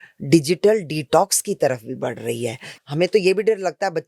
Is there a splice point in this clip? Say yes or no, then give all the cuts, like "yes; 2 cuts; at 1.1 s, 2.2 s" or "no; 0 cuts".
yes; 1 cut; at 2.7 s